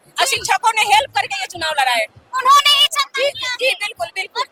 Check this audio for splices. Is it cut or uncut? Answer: uncut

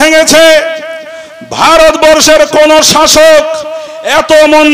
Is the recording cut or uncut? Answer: uncut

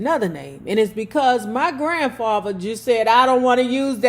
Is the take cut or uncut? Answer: uncut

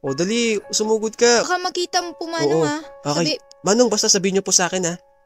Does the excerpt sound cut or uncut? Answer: cut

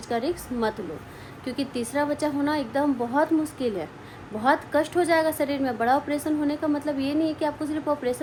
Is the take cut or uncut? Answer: uncut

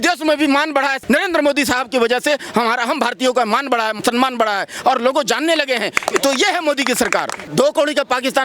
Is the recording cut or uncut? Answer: cut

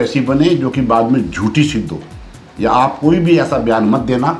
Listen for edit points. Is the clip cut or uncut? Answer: uncut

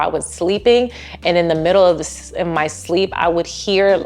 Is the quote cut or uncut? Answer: uncut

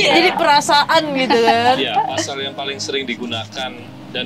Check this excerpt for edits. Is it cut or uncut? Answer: uncut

